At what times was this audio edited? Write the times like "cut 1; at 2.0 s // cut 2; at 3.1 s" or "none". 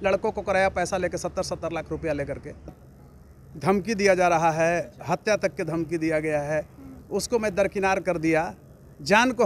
cut 1; at 2.8 s